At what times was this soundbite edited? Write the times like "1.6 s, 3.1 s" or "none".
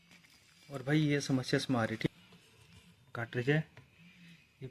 2.1 s

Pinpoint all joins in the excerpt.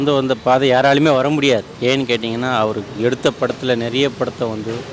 1.7 s

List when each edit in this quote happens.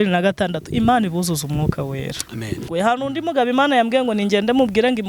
2.6 s

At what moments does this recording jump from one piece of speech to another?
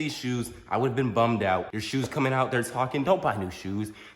1.7 s

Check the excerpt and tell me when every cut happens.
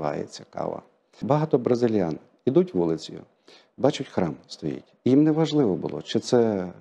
1.2 s

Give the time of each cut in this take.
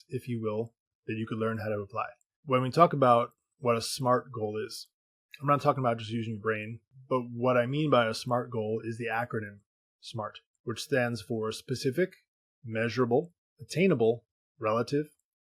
2.3 s, 6.9 s, 10.5 s

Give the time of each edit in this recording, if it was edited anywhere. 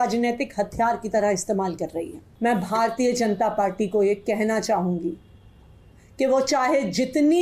2.2 s

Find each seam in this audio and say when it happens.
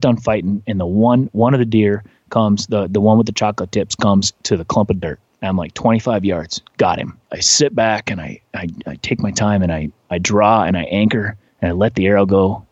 4.4 s, 7.3 s

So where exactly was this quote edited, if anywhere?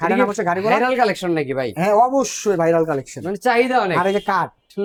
none

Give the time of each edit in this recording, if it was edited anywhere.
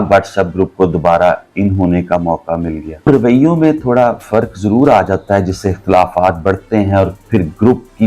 3.1 s

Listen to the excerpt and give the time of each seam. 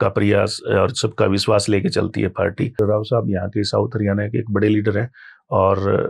2.8 s

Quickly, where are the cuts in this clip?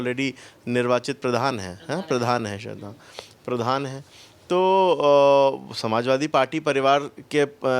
none

